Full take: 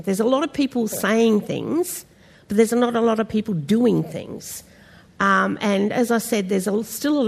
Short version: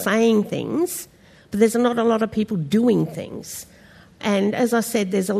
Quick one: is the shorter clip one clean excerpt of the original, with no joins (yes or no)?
no